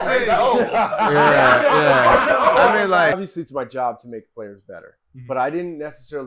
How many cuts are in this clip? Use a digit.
1